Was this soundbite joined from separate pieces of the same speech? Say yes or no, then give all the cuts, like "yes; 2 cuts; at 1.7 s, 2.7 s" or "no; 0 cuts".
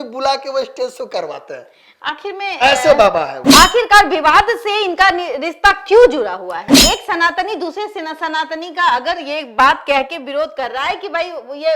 yes; 2 cuts; at 3.4 s, 6.7 s